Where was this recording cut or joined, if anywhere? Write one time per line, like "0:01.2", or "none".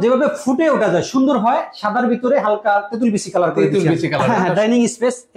0:04.3